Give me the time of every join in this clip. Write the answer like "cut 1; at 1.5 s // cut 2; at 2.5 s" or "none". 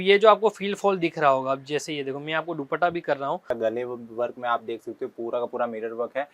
cut 1; at 3.5 s